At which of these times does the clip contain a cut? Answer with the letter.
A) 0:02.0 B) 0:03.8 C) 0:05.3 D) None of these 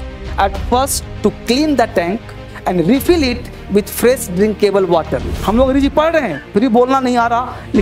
C